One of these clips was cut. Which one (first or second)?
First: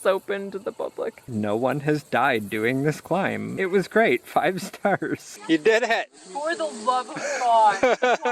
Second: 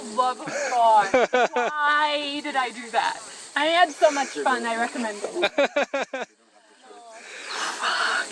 first